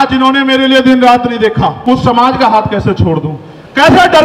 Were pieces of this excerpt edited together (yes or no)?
yes